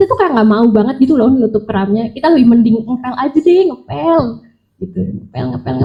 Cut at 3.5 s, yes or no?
no